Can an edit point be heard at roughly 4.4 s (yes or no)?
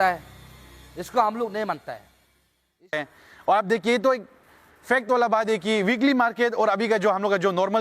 no